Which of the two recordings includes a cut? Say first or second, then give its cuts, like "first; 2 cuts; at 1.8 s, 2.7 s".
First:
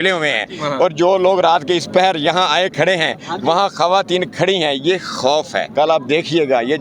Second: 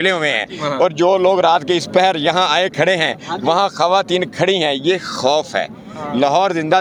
first; 1 cut; at 5.6 s